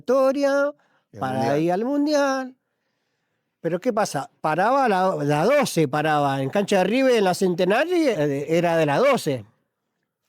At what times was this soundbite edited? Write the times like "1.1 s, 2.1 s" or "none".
8.2 s